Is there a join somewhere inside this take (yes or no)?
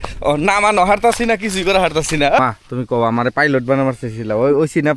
yes